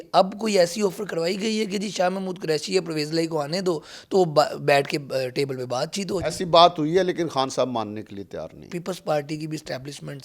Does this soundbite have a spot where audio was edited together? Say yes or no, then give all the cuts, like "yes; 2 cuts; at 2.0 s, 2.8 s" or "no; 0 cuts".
yes; 1 cut; at 8.7 s